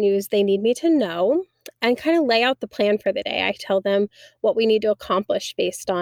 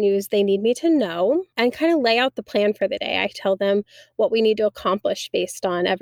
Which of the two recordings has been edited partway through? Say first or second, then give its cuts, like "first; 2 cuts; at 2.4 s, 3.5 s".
second; 1 cut; at 1.5 s